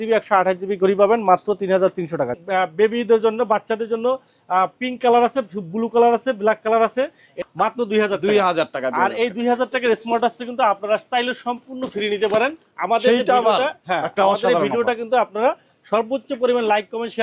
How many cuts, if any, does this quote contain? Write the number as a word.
two